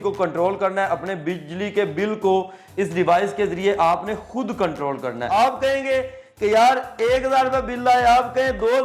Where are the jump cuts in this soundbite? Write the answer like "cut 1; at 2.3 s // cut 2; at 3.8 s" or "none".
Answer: cut 1; at 5.3 s